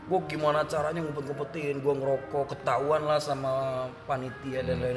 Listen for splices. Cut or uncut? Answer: uncut